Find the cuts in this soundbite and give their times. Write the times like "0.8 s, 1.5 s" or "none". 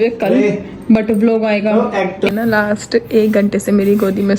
2.3 s